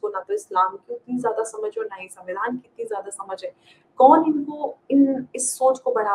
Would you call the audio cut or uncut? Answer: uncut